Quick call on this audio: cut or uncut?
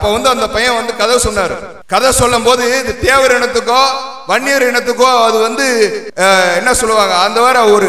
cut